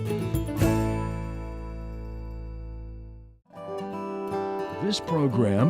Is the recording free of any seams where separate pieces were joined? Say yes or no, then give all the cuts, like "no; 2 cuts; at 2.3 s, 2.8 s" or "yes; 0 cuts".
no; 2 cuts; at 3.6 s, 4.8 s